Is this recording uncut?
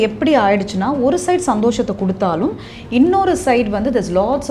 yes; 0 cuts

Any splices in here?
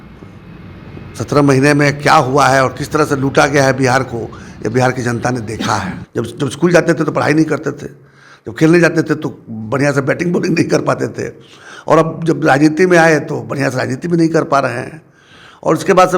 yes; 1 cut; at 6.0 s

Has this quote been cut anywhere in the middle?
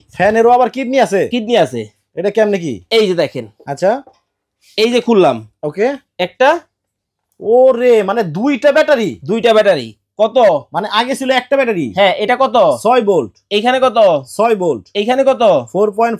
no; 0 cuts

